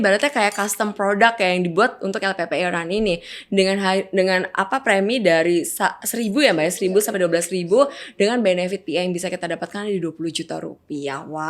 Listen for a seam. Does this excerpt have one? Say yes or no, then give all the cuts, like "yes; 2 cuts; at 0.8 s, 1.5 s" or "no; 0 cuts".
no; 0 cuts